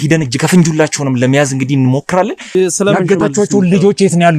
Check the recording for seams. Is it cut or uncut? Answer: cut